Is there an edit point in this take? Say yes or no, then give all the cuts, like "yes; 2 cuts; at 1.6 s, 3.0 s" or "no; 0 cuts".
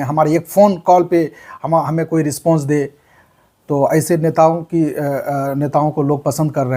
no; 0 cuts